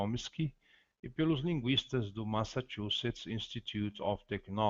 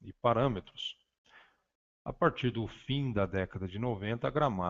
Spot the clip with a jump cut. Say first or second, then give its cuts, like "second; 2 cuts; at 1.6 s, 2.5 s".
first; 1 cut; at 2.1 s